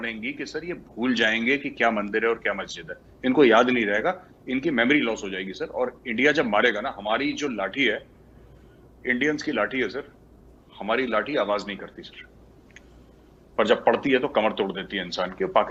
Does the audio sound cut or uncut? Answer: uncut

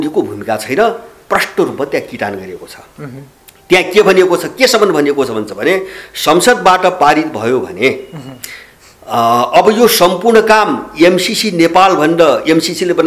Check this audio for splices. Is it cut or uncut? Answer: uncut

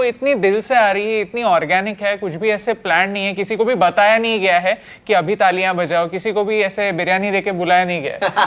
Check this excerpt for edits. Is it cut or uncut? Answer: uncut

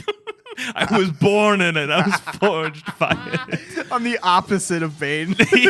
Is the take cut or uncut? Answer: uncut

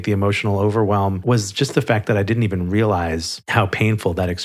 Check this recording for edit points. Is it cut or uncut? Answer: cut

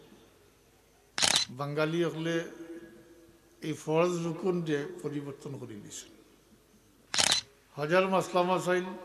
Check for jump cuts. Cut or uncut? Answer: cut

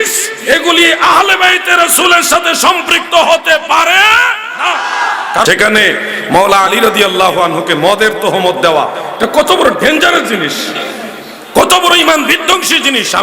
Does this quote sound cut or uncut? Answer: cut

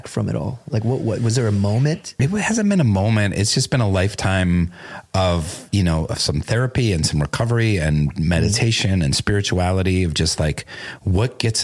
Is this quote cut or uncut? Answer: cut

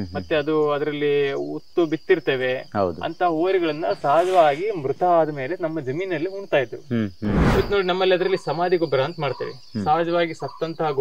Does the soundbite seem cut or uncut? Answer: cut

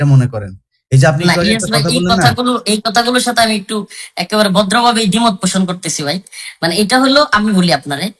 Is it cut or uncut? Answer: uncut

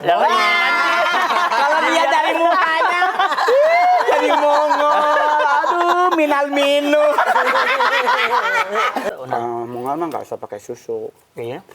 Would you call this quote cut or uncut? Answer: cut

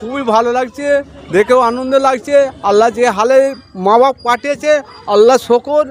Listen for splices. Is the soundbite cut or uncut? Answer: uncut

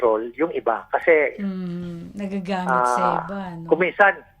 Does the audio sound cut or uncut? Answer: uncut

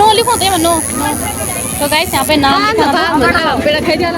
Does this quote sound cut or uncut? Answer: uncut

